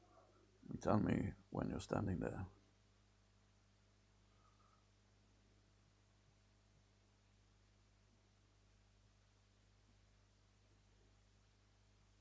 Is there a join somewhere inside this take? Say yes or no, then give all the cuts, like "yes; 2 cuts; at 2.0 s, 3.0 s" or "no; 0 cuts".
no; 0 cuts